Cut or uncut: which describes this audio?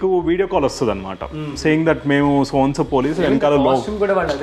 uncut